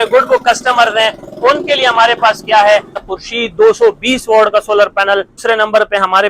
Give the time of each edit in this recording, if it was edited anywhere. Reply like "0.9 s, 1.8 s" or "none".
3.1 s, 5.4 s